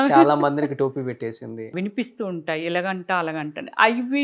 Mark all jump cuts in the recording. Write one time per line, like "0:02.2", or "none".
0:01.7